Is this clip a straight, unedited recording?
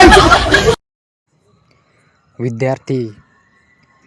no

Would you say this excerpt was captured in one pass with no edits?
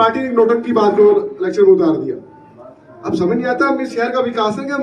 yes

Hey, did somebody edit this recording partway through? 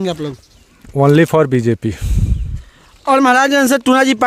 no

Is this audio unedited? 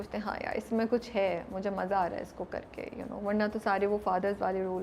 yes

